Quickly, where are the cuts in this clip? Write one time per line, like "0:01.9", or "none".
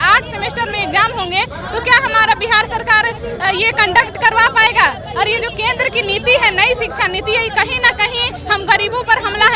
none